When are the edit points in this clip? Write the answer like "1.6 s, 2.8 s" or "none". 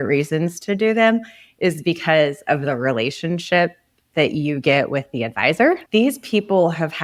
5.8 s